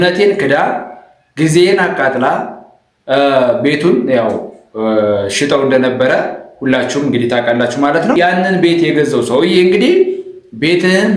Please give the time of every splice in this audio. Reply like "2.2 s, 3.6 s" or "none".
8.2 s